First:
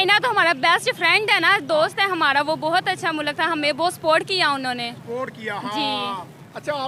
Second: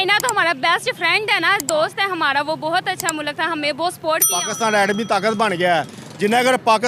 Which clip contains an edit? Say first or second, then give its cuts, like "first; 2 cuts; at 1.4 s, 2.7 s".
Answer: second; 1 cut; at 4.4 s